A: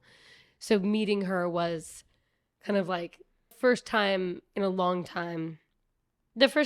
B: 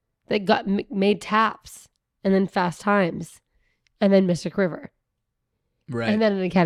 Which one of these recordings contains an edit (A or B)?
A